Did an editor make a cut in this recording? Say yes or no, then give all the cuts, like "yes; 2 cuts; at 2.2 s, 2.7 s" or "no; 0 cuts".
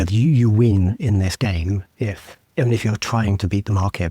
no; 0 cuts